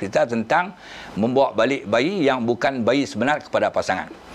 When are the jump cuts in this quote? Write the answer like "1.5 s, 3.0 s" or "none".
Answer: none